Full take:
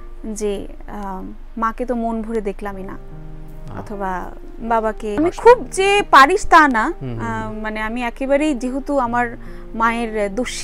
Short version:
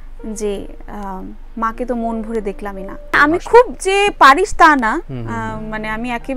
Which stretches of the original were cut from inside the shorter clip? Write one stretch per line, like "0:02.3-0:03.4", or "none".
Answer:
0:03.2-0:05.1